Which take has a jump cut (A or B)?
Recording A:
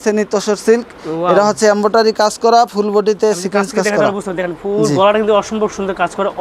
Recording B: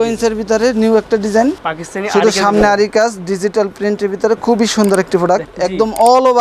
B